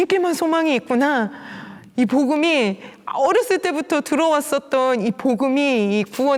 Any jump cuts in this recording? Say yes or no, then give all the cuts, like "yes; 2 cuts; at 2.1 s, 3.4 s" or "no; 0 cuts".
no; 0 cuts